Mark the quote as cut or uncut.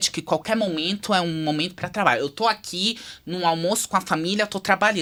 uncut